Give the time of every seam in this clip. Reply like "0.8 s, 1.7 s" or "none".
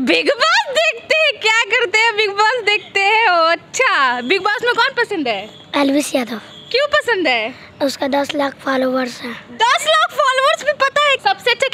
none